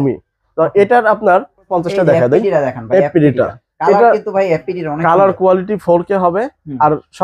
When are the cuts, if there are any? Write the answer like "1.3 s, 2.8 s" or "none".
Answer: 1.7 s